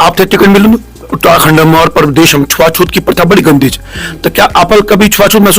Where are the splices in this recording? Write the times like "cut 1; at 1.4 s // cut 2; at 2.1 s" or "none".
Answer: cut 1; at 1.2 s